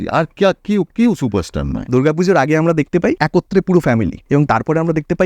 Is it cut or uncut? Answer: cut